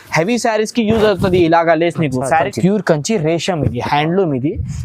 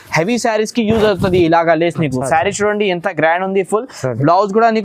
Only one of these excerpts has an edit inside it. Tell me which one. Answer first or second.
first